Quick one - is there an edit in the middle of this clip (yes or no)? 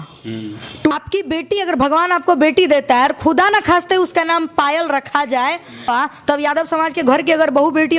yes